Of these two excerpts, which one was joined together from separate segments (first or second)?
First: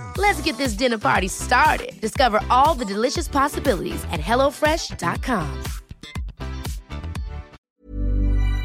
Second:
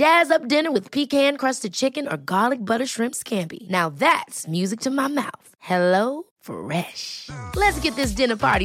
first